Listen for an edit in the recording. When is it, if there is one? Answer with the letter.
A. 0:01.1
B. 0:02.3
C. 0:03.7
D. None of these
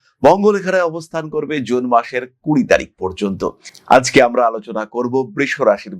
D